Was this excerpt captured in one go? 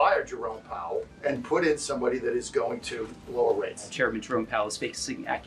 no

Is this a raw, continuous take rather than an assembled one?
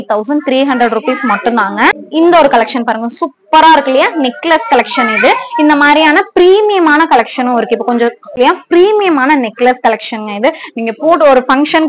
yes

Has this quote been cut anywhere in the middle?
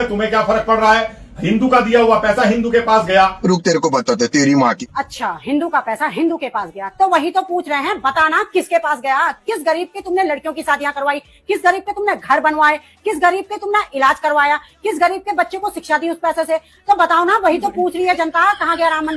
no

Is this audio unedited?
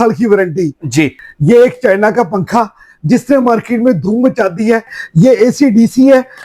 no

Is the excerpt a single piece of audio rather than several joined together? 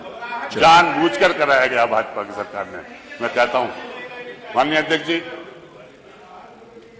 yes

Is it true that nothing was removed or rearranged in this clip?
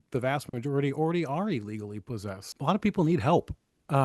no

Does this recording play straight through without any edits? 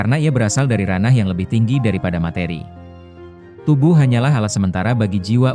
yes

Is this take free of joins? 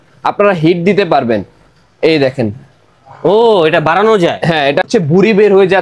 no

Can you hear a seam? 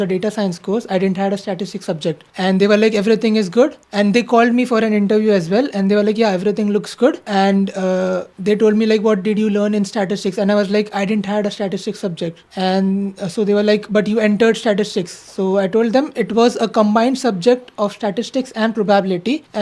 no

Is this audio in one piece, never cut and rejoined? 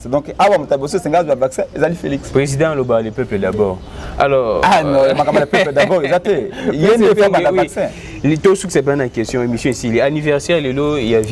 yes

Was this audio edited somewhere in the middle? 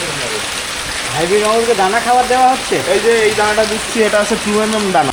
no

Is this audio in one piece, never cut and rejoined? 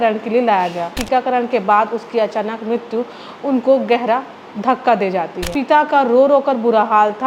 no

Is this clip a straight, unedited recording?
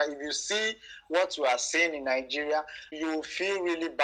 no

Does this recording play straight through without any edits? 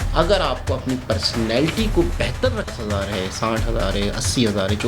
no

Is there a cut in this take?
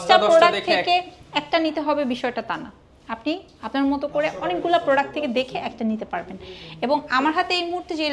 no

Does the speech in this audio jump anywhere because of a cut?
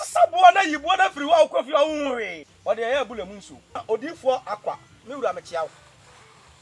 yes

